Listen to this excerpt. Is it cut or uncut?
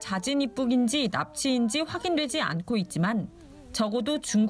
cut